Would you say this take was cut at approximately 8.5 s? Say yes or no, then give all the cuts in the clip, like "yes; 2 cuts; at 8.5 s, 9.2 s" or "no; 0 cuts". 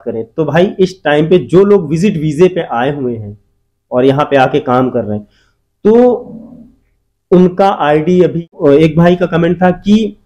yes; 1 cut; at 8.5 s